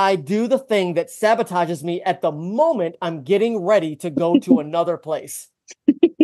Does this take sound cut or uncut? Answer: uncut